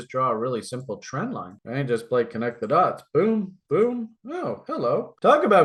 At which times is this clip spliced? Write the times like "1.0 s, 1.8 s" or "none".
none